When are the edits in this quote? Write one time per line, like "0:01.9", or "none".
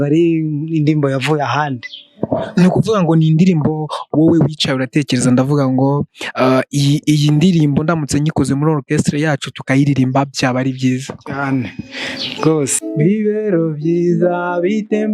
0:12.8